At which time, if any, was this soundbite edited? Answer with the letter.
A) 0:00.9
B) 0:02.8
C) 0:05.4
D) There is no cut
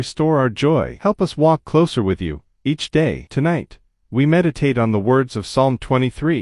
A